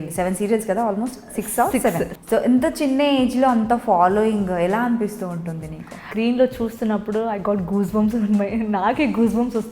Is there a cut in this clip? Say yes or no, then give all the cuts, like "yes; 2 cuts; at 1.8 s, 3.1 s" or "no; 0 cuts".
yes; 2 cuts; at 2.2 s, 6.1 s